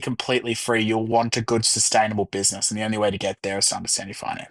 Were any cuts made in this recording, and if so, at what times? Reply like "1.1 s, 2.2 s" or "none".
none

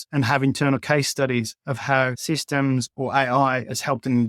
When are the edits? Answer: 2.2 s

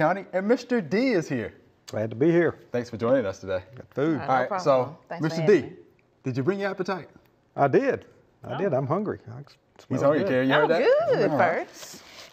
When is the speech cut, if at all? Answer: none

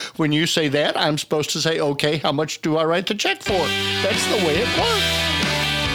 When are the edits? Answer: 5.0 s

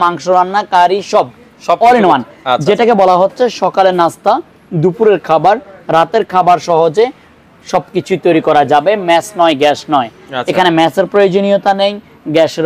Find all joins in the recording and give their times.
none

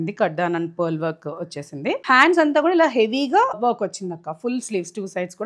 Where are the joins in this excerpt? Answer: 2.0 s, 3.6 s

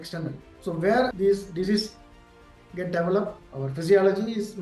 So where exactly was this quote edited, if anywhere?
none

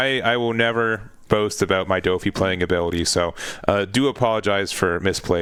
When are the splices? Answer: none

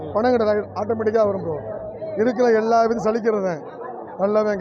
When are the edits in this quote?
none

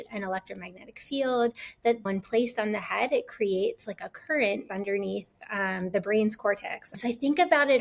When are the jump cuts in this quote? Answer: 2.0 s, 4.7 s, 7.0 s

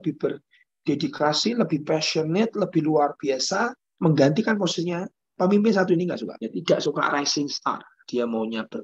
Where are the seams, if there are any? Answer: 3.8 s, 6.3 s, 7.9 s

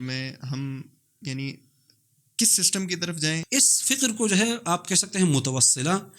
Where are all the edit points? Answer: 3.4 s

